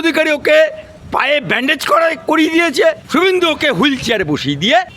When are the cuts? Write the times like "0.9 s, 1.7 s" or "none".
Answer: 0.9 s, 3.0 s